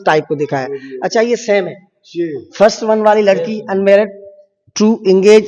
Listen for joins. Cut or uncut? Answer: uncut